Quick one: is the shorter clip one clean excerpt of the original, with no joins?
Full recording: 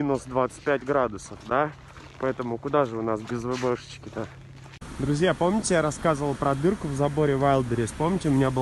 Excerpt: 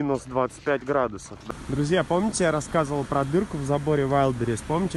no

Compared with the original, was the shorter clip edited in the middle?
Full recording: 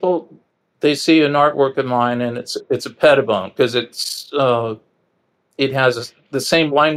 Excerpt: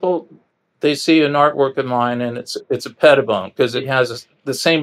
yes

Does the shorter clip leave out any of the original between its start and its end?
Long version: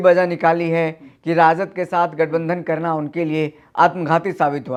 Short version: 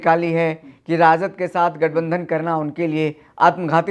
no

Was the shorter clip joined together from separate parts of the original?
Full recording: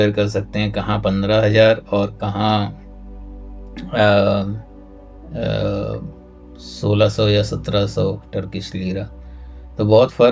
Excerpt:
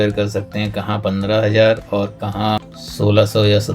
yes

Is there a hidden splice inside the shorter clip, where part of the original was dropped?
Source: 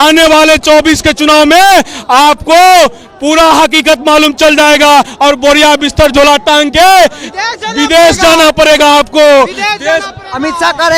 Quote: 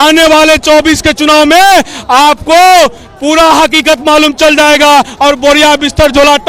no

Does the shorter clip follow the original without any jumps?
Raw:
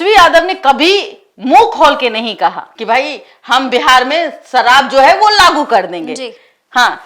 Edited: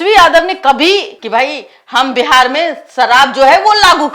no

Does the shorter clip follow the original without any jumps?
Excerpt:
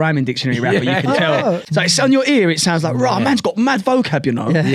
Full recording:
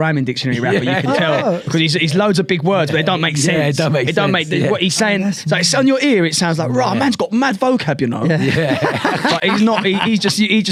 no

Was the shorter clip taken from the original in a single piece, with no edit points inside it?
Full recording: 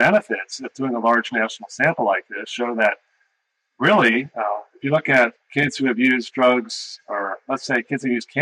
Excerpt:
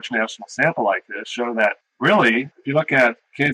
no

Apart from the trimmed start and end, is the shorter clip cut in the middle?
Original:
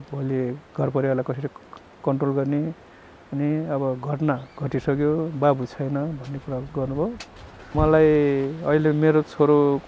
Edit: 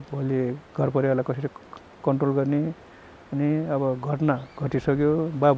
no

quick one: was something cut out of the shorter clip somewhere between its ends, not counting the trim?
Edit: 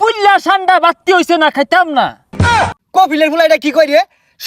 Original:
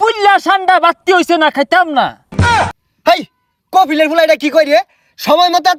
yes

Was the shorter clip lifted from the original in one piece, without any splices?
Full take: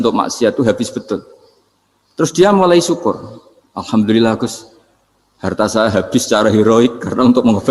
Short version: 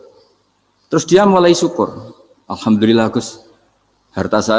yes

